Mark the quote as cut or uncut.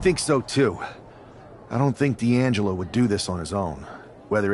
uncut